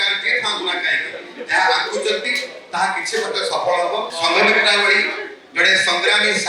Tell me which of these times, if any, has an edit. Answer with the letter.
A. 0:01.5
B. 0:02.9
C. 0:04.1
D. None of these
C